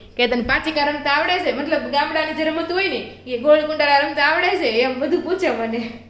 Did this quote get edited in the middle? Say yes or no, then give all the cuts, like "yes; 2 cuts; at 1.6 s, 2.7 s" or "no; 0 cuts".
no; 0 cuts